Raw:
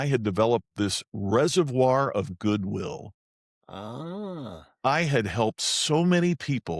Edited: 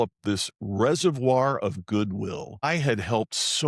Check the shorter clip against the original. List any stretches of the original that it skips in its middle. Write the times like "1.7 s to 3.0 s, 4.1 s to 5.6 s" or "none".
3.2 s to 4.9 s